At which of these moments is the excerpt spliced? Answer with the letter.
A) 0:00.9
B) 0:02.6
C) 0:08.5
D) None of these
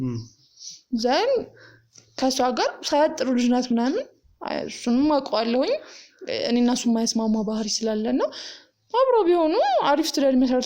D